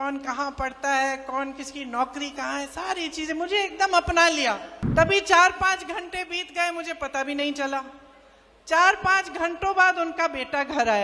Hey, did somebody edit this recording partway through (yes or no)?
yes